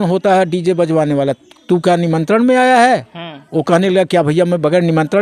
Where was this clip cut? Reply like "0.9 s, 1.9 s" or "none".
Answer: none